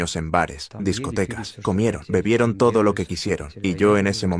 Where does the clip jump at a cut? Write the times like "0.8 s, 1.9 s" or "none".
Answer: 3.5 s

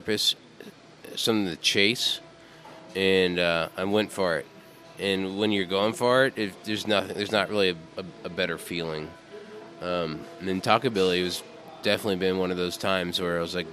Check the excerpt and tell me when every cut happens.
none

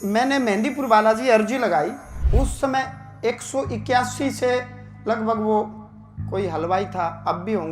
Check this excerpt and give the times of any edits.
2.1 s

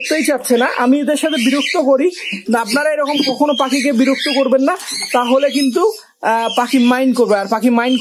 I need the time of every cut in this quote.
none

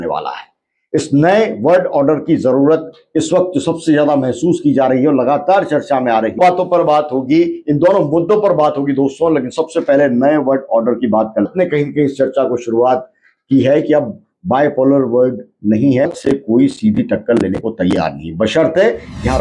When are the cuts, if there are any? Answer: 6.4 s, 11.5 s, 16.1 s

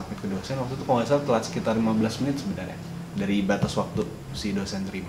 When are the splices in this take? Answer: none

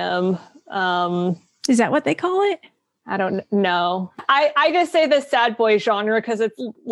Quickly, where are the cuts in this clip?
4.2 s

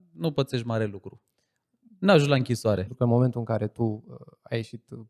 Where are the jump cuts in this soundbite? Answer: 2.9 s

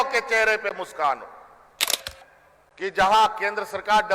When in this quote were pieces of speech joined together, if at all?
2.0 s

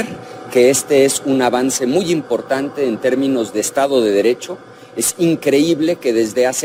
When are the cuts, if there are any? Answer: none

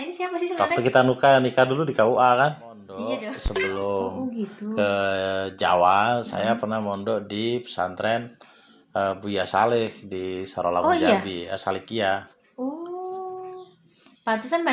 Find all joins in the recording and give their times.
3.3 s

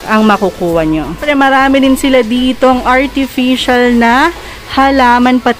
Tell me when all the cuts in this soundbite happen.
1.2 s

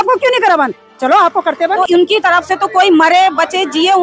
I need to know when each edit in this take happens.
1.9 s

